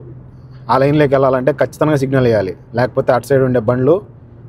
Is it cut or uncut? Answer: uncut